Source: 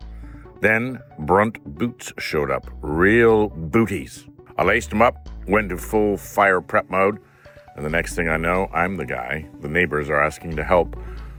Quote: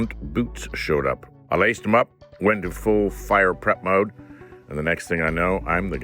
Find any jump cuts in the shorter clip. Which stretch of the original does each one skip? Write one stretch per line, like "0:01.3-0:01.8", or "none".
0:02.7-0:04.4